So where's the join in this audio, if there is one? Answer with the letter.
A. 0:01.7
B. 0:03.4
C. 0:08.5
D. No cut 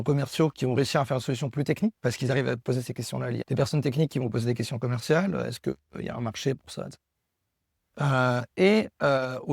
B